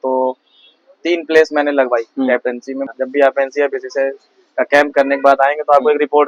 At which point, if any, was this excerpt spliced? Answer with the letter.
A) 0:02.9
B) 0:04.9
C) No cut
A